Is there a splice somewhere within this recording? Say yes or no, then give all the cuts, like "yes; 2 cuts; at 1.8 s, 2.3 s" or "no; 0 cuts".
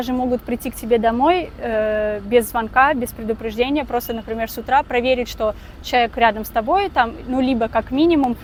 no; 0 cuts